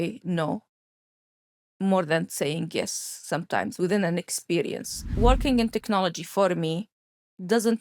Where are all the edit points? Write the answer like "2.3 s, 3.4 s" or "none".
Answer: 5.1 s